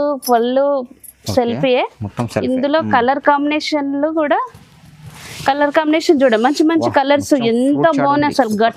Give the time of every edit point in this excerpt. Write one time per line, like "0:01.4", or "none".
none